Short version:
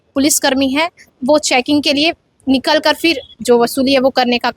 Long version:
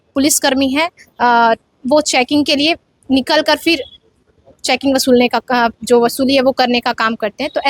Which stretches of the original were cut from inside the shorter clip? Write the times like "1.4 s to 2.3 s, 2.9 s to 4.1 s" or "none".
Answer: 1.1 s to 1.7 s, 4.0 s to 5.8 s